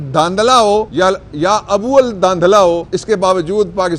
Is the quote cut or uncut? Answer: cut